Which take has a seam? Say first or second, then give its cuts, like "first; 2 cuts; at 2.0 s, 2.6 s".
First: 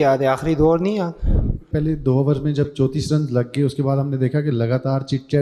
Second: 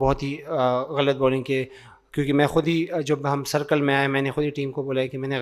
first; 1 cut; at 1.7 s